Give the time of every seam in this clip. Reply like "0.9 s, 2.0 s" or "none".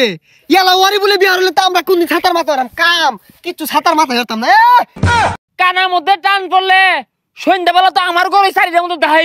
5.0 s